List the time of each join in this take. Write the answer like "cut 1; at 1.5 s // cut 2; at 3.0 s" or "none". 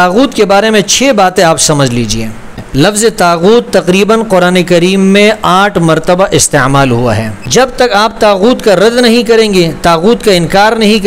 cut 1; at 2.6 s // cut 2; at 7.3 s